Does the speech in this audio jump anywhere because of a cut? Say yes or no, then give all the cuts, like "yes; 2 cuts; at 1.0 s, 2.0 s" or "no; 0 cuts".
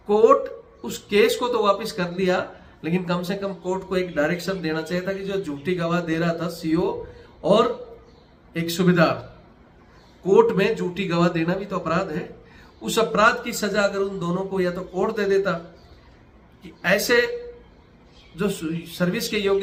no; 0 cuts